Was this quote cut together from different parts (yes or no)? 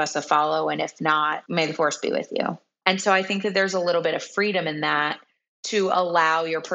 yes